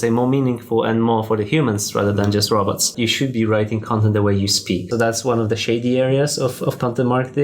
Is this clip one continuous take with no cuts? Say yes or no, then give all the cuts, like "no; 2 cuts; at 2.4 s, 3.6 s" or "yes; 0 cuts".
no; 2 cuts; at 2.9 s, 4.8 s